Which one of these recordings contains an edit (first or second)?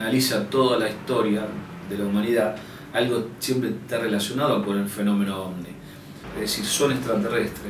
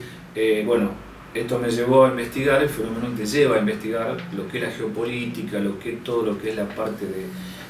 first